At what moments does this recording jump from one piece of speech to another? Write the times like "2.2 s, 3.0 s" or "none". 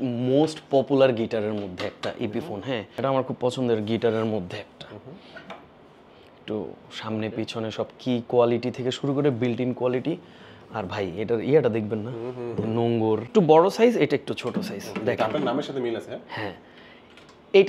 2.9 s, 13.3 s